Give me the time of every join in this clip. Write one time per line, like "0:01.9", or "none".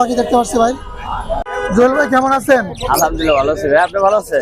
0:01.4